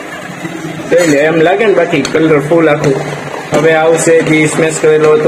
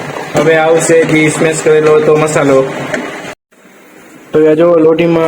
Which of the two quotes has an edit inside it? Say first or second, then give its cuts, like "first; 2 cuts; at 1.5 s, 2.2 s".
second; 1 cut; at 3.3 s